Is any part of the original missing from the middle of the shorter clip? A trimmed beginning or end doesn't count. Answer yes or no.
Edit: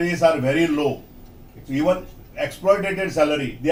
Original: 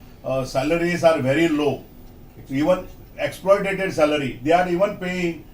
no